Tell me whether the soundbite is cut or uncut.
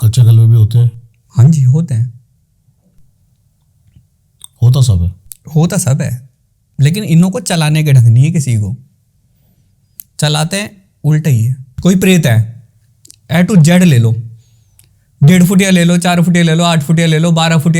uncut